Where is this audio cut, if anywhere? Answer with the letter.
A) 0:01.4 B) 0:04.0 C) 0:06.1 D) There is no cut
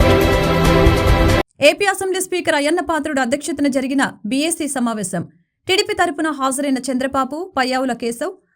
A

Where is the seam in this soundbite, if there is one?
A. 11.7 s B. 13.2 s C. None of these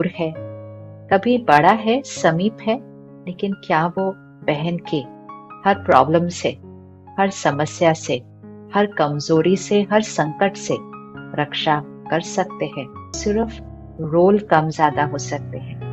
B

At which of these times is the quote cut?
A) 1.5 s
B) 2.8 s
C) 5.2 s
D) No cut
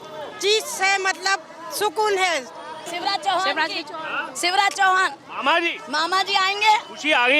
B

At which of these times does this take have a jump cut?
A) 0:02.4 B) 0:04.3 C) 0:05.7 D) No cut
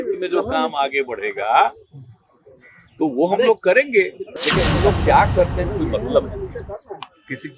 B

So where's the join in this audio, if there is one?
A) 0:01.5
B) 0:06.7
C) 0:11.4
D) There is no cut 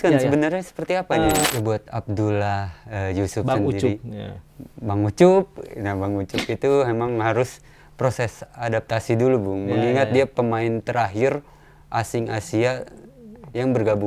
A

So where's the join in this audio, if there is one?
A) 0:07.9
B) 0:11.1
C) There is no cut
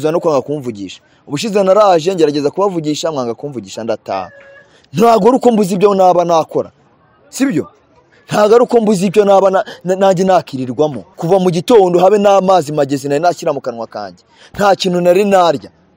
B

